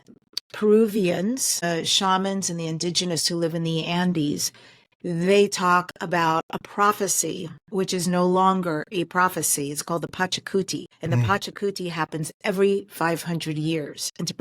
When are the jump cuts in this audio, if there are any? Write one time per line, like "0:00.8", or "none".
0:01.6
0:10.9